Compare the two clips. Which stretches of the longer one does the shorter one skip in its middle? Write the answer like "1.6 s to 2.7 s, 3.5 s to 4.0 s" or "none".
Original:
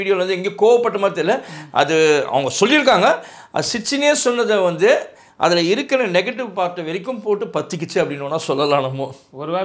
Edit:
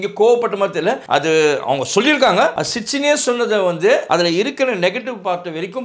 1.4 s to 1.7 s, 3.3 s to 3.6 s, 5.0 s to 5.4 s